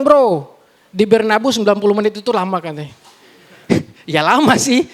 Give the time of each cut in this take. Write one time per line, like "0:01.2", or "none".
none